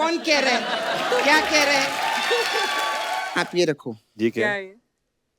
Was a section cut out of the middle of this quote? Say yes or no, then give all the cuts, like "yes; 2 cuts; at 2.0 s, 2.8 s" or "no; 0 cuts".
yes; 1 cut; at 3.3 s